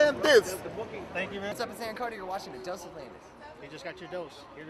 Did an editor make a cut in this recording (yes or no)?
yes